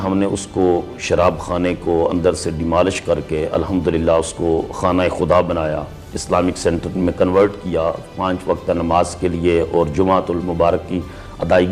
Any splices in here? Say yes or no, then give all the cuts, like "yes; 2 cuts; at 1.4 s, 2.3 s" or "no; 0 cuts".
no; 0 cuts